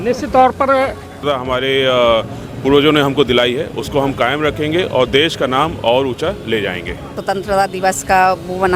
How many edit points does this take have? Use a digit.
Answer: 2